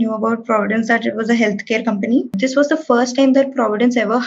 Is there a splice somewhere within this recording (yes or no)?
yes